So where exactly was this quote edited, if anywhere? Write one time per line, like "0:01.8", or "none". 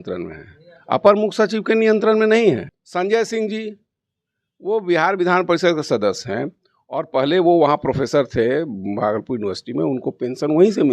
0:02.8